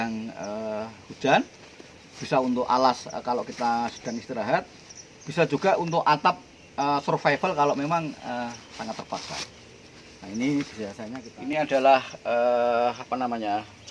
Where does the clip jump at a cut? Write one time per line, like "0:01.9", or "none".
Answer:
0:11.1